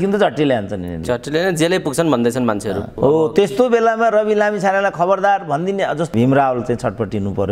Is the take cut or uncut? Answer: cut